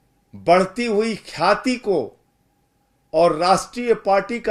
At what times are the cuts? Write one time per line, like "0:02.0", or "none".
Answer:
none